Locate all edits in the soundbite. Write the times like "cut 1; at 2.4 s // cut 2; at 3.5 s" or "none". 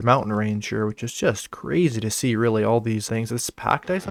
none